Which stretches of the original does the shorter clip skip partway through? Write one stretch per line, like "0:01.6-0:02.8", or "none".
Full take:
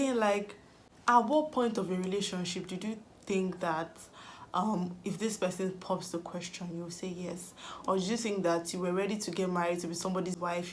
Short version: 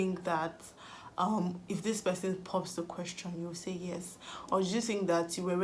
none